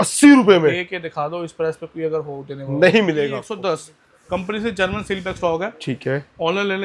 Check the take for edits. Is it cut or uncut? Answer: cut